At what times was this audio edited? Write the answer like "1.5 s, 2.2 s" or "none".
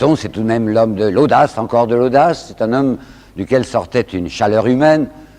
3.5 s